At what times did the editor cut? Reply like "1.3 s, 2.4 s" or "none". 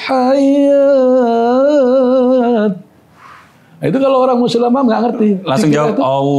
none